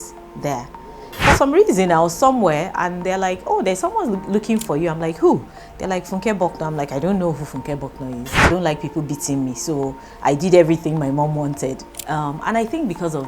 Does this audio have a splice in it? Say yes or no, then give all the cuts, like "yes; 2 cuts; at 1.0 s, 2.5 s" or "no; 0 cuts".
yes; 3 cuts; at 1.0 s, 8.3 s, 11.8 s